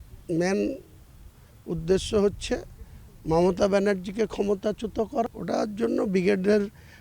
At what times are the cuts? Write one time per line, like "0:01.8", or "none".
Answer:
0:05.3